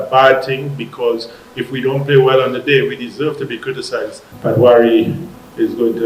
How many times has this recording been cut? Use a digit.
1